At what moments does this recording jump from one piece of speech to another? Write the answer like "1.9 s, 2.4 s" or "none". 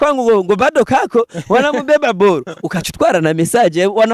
none